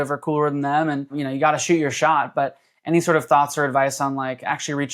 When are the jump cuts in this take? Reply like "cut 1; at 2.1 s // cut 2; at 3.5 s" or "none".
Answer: none